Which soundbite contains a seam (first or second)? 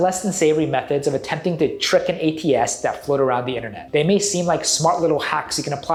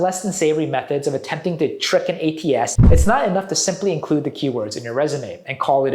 second